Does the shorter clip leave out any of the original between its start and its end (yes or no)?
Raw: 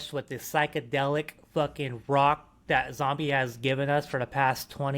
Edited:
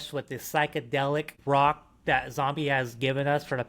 yes